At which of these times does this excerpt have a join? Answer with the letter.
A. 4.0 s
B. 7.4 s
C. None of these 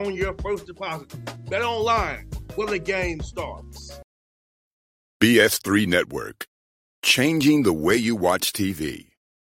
A